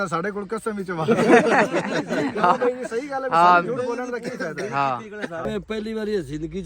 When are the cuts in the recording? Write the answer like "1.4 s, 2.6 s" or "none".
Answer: 5.5 s